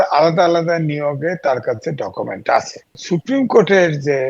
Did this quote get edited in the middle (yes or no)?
yes